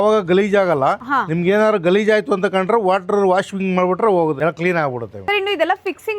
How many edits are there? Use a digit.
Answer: 0